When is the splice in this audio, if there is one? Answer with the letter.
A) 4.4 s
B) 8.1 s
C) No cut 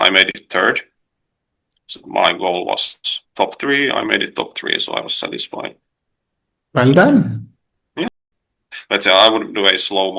B